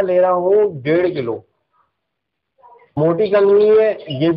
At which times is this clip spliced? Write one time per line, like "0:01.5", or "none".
0:02.9